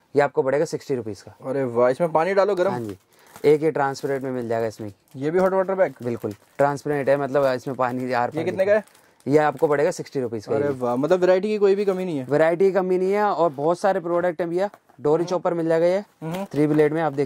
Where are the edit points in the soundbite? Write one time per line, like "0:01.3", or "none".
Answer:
none